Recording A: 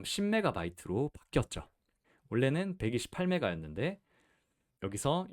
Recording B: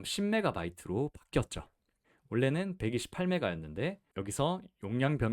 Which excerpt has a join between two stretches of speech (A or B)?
B